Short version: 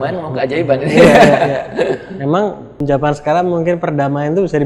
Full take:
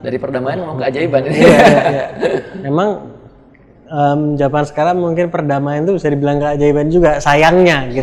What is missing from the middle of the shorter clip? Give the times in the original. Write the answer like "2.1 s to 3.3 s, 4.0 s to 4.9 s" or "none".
3.3 s to 4.3 s